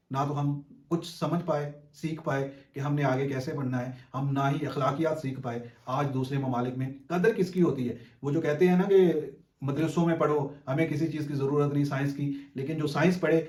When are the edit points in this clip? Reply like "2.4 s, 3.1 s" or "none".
none